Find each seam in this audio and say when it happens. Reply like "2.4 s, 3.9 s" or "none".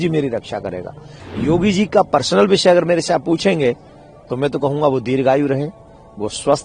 1.1 s